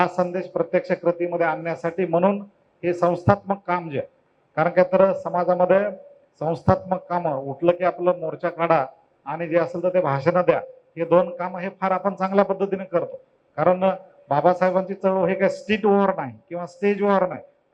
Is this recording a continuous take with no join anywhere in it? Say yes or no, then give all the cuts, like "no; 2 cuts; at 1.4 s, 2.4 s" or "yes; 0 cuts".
yes; 0 cuts